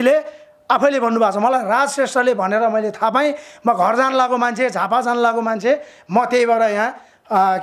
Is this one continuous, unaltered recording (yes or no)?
yes